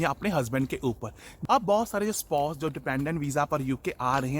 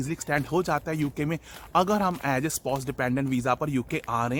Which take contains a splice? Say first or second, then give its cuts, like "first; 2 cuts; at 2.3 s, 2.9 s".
first; 1 cut; at 1.3 s